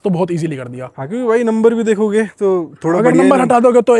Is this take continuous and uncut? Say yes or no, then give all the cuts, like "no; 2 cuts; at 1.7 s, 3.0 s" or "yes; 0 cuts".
yes; 0 cuts